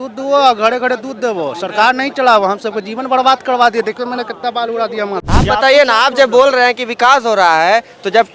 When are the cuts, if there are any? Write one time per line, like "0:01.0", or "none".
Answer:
0:05.2

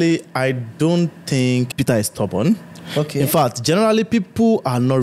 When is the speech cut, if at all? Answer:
0:01.7

